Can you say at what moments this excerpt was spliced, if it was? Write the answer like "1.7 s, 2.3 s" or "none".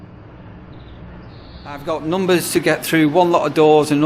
1.8 s